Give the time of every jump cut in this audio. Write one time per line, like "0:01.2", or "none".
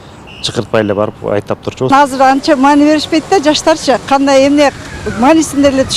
0:01.9